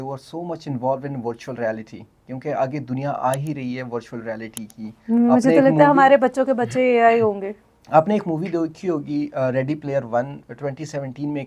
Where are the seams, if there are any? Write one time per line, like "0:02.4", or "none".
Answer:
none

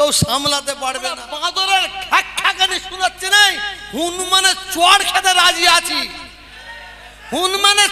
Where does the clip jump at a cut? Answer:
0:01.2

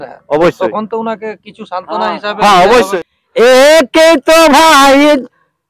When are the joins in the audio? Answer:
0:02.9

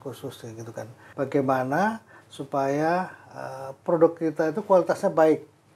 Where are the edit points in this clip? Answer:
0:01.0

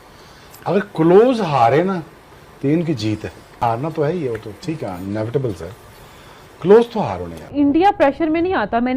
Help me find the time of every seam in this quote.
0:03.6
0:07.5

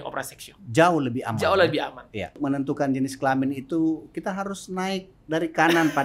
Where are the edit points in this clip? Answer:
0:02.3

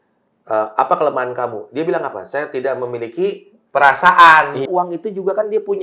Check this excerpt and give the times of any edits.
0:04.6

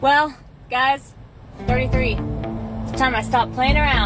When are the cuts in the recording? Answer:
none

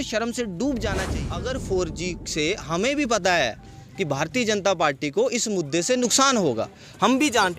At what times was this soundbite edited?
0:01.2

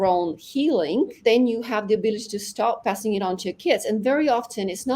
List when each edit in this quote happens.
0:01.2
0:02.8

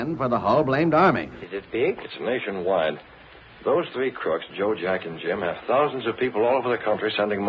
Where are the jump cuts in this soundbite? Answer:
0:01.4

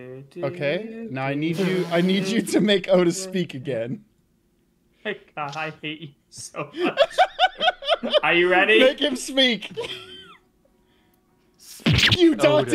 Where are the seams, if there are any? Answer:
none

